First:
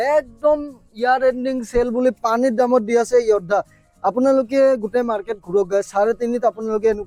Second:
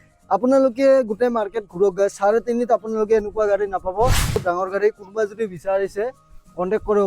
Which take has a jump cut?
second; 1 cut; at 4.4 s

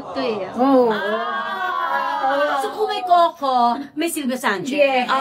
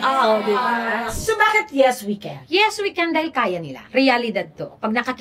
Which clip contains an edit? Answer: second; 3 cuts; at 1.1 s, 2.3 s, 3.9 s

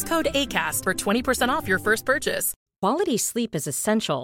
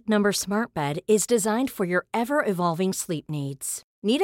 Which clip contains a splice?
first; 1 cut; at 2.5 s

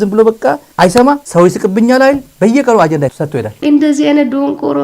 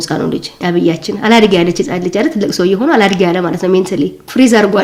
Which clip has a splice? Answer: first; 3 cuts; at 1.2 s, 2.3 s, 3.5 s

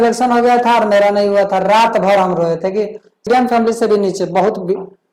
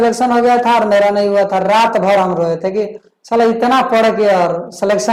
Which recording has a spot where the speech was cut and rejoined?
first; 1 cut; at 3.3 s

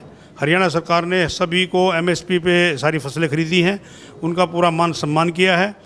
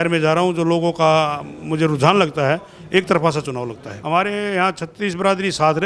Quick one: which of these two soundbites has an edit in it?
second; 1 cut; at 3.9 s

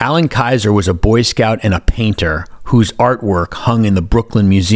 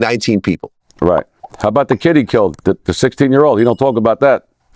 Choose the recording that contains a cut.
second; 1 cut; at 1.4 s

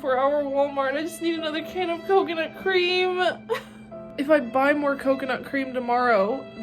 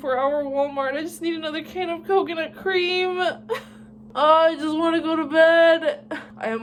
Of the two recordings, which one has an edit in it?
first; 1 cut; at 4.0 s

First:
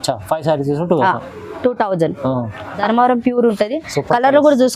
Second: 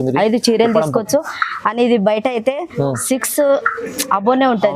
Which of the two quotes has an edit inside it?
first; 1 cut; at 2.8 s

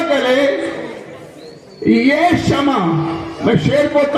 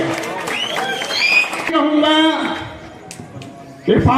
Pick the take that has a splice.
second; 1 cut; at 1.7 s

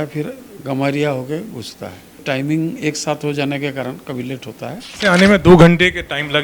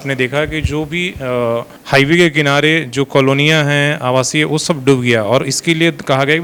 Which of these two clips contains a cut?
first; 2 cuts; at 2.2 s, 4.9 s

